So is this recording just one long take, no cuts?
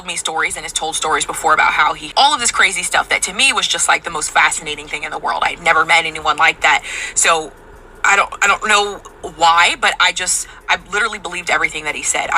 no; 1 cut; at 2.1 s

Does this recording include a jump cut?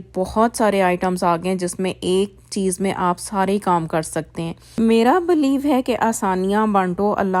yes; 1 cut; at 4.6 s

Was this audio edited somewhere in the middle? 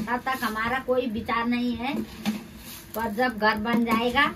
no; 0 cuts

